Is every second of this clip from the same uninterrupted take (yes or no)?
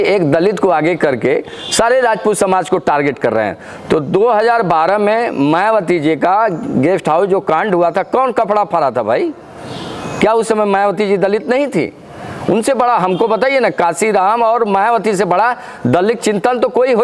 yes